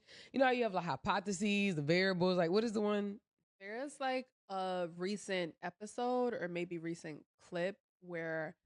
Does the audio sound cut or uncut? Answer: cut